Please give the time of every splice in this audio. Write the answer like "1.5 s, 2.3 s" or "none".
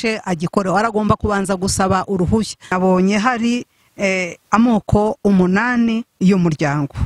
2.8 s